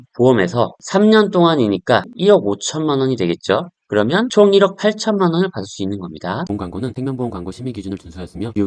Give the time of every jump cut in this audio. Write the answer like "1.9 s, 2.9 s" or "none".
2.1 s, 6.4 s